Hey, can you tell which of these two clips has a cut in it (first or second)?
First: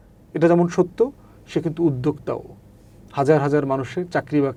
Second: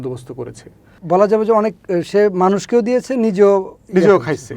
second